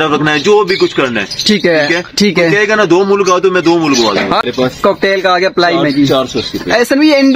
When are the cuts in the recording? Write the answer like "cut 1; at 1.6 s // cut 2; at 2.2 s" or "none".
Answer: cut 1; at 4.4 s